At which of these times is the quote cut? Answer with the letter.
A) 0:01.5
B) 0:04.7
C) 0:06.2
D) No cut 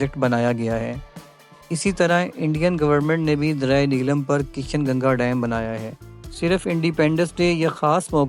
C